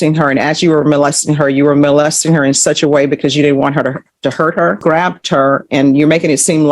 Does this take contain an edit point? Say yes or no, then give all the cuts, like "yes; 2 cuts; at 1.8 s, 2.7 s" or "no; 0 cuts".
yes; 1 cut; at 4.8 s